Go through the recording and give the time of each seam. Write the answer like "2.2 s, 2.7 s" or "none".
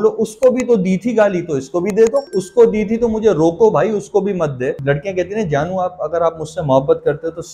2.3 s, 4.8 s